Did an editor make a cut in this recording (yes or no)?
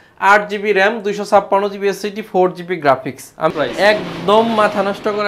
yes